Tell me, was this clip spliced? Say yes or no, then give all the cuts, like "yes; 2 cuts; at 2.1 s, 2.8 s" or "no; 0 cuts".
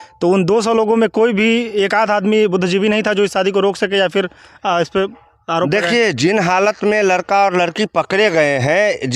no; 0 cuts